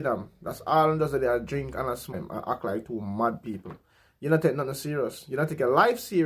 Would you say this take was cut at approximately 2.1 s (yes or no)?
yes